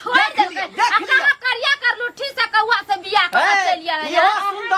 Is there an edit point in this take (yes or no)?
no